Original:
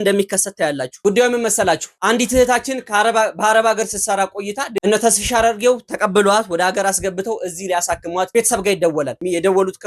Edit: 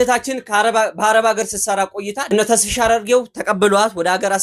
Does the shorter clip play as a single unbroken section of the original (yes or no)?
no